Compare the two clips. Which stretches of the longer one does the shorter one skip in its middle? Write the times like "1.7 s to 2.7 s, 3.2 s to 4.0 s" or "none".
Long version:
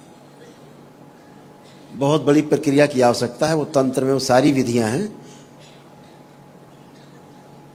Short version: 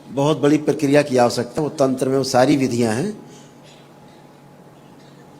3.4 s to 3.5 s